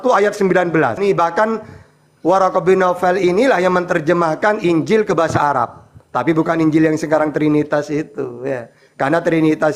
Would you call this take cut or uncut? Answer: cut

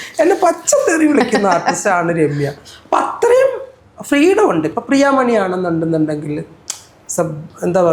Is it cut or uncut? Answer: uncut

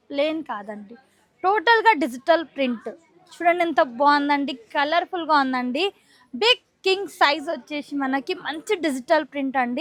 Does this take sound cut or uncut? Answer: uncut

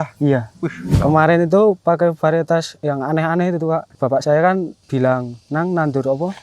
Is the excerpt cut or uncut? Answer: cut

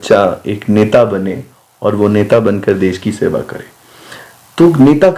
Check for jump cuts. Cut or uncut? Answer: uncut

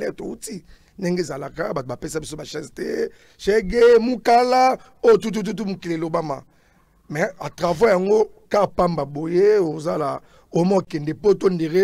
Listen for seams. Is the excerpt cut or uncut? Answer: uncut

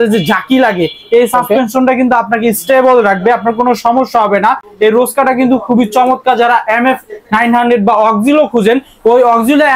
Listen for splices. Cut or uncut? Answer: uncut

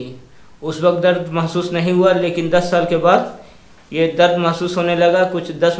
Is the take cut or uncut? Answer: uncut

